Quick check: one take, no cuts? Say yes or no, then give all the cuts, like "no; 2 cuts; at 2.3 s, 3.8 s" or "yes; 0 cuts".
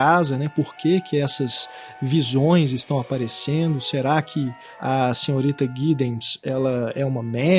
no; 1 cut; at 4.6 s